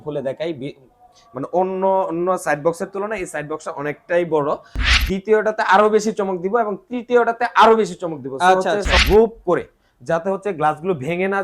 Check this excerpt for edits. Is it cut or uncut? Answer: cut